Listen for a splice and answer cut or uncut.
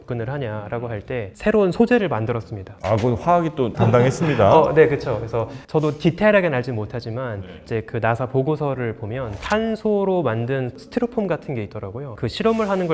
uncut